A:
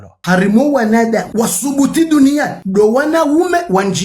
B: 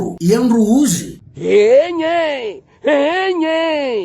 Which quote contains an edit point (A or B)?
B